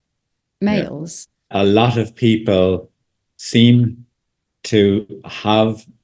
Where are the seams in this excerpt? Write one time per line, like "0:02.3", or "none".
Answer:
0:01.5